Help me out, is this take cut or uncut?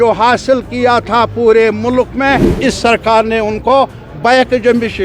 cut